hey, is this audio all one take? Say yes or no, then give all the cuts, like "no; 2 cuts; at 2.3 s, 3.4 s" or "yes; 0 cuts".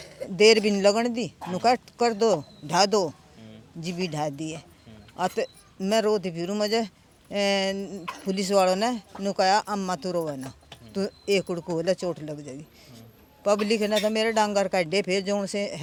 yes; 0 cuts